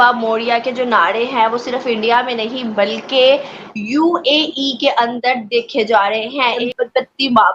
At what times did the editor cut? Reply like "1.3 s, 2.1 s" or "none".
6.6 s